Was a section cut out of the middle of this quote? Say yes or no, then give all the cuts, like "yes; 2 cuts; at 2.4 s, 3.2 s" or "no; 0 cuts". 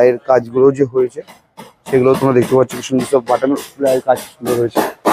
no; 0 cuts